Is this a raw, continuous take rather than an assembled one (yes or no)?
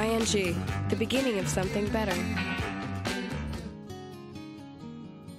no